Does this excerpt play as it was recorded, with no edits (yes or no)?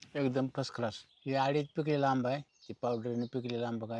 no